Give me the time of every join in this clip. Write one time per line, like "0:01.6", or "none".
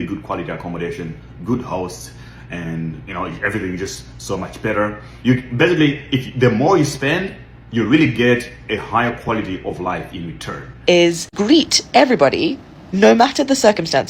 0:10.8